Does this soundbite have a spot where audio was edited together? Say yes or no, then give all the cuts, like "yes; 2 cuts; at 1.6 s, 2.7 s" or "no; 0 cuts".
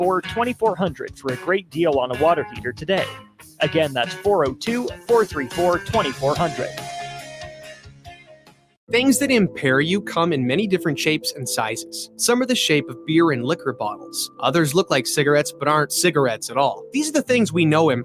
yes; 1 cut; at 9.0 s